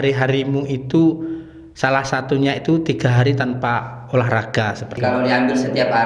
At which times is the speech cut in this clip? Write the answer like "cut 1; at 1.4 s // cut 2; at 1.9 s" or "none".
cut 1; at 5.0 s